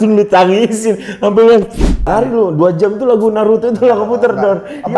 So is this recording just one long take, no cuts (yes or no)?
no